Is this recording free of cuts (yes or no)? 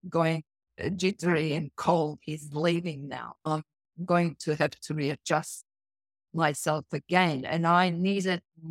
yes